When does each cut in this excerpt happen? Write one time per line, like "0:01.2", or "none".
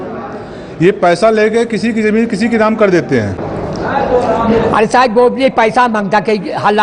0:03.5

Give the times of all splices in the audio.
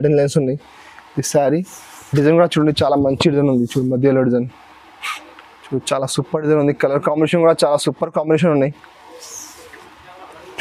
none

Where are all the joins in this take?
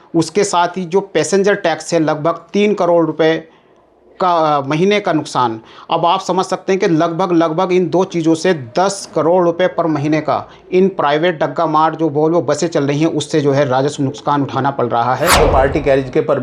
0:15.4

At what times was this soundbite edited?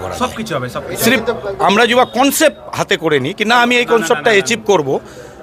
none

